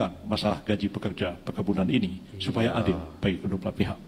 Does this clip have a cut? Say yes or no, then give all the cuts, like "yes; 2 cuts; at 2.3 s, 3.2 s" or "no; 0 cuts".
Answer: no; 0 cuts